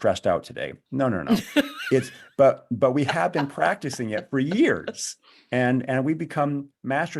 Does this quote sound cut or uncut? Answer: uncut